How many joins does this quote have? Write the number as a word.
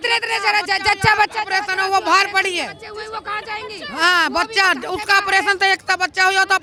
zero